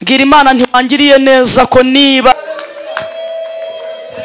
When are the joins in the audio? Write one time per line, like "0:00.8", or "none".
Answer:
0:02.3